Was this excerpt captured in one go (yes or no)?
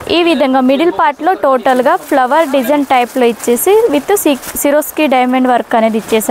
yes